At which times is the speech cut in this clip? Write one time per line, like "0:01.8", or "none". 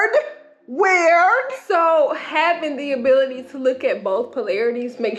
none